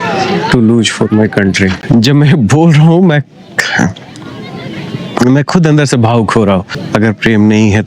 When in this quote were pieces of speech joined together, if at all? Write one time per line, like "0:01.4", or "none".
0:01.8
0:06.8